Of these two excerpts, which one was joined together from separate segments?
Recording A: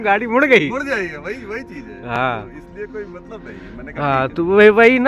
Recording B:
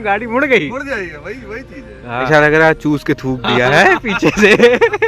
B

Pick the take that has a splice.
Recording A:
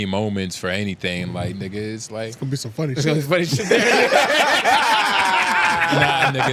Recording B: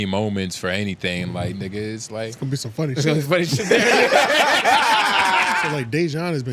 B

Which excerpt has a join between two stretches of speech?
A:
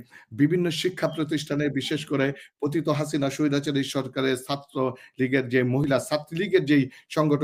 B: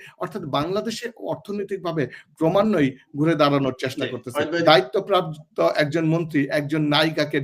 B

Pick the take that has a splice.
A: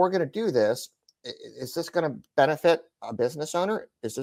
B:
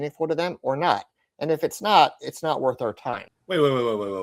B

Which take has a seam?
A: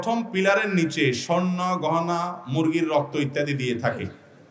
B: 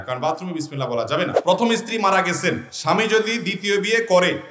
B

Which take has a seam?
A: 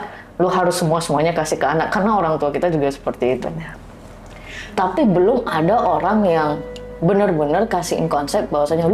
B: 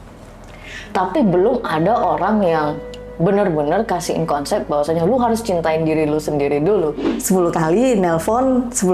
B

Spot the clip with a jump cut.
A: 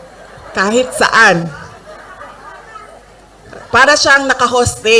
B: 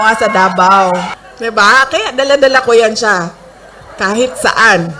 B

